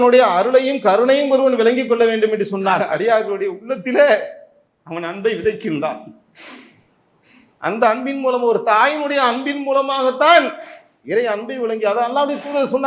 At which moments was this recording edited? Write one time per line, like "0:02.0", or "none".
0:02.8